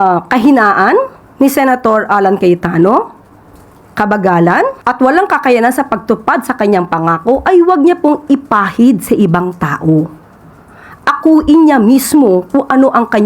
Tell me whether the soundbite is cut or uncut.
cut